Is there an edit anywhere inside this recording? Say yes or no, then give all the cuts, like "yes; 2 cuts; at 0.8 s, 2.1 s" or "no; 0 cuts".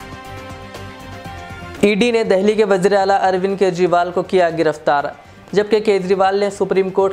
yes; 1 cut; at 1.7 s